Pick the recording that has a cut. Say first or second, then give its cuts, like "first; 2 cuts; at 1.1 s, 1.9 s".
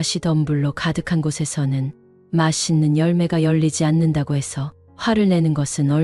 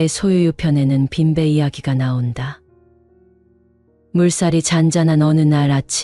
second; 2 cuts; at 2.6 s, 4.0 s